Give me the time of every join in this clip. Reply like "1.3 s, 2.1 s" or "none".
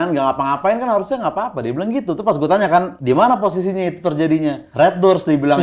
2.9 s, 4.6 s